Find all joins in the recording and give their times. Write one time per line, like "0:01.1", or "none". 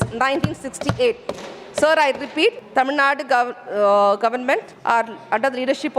0:02.6
0:04.7

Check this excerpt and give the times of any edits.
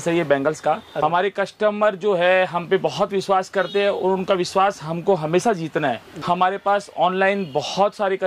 0:01.0
0:06.1

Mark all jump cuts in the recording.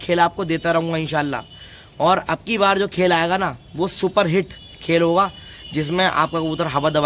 none

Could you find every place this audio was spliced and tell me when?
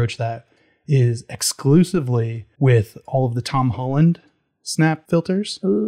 0:02.4
0:05.0

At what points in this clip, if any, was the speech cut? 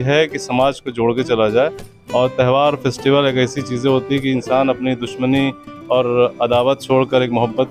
none

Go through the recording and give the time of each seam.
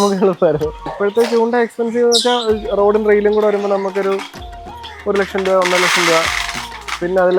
0:00.9

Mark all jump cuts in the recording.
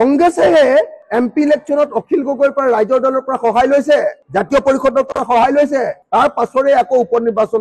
none

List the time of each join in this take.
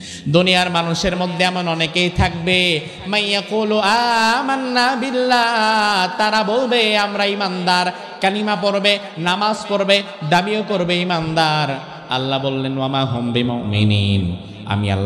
none

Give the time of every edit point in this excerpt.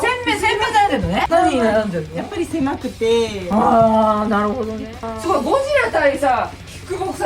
0:05.1

